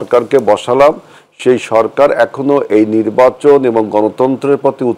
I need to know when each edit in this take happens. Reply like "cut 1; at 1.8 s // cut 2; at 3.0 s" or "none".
none